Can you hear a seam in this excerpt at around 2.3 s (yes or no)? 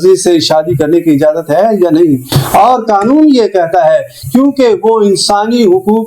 no